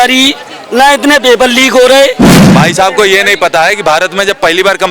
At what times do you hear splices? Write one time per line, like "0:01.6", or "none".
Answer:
0:02.4